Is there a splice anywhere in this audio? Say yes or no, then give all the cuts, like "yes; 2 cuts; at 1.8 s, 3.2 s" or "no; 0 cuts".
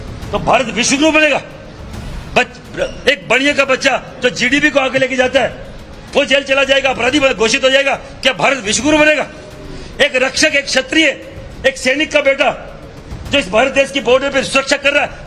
no; 0 cuts